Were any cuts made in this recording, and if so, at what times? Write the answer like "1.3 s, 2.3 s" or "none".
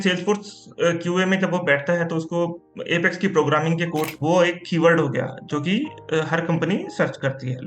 4.1 s

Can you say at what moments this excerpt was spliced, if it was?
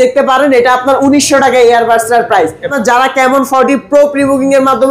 2.7 s

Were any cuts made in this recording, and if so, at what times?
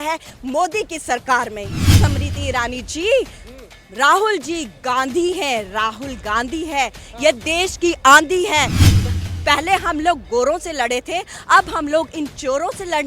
1.8 s

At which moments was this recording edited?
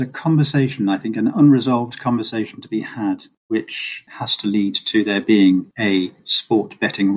3.9 s, 5.7 s

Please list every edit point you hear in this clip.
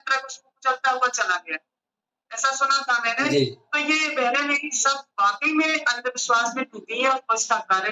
none

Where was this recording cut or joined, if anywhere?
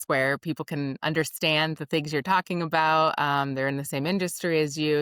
none

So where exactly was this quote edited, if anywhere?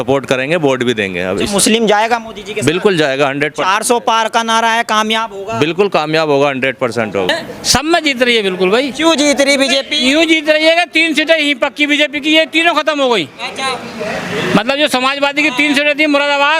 7.3 s

